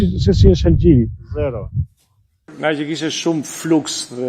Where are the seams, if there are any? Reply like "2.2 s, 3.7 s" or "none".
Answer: 2.5 s